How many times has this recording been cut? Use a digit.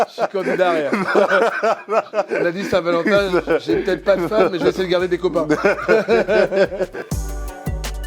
1